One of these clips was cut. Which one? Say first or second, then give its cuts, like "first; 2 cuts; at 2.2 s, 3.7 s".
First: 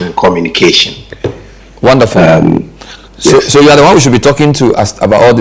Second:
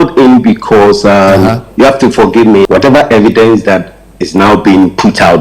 second; 1 cut; at 2.7 s